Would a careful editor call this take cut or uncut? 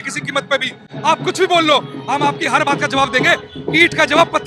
uncut